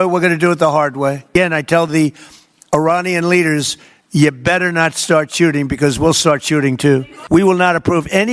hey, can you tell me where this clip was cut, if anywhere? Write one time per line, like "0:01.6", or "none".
0:01.3
0:07.1

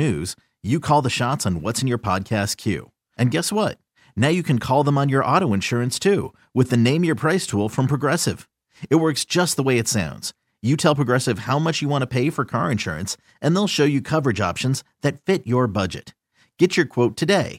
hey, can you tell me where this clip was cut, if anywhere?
none

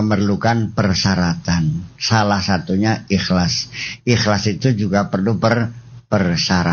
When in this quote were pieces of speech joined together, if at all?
none

